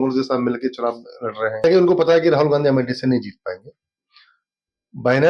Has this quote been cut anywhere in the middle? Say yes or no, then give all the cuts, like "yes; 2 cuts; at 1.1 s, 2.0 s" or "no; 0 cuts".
yes; 1 cut; at 1.6 s